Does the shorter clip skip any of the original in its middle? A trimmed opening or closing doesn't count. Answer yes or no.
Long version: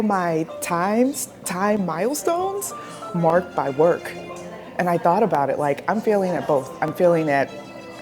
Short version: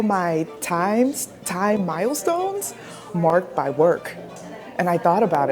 no